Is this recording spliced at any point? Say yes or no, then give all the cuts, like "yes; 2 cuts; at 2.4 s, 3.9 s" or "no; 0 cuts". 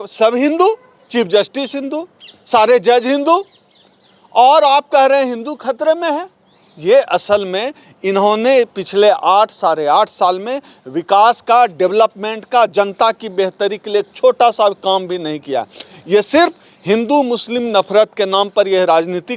no; 0 cuts